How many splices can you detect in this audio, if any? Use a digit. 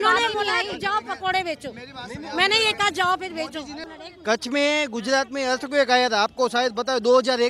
1